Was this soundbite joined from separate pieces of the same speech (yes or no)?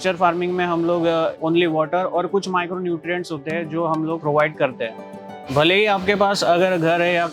yes